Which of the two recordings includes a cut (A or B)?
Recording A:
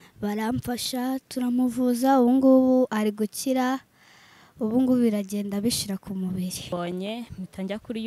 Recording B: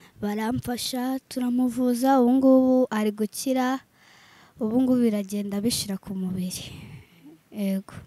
A